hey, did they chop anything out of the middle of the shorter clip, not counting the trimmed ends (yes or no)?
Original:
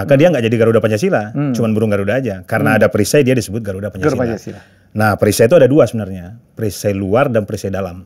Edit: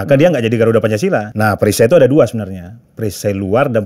yes